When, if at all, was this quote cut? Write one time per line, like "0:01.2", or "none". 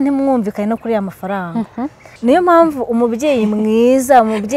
0:02.0